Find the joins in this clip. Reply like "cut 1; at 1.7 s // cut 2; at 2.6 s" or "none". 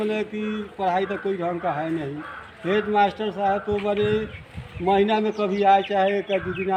none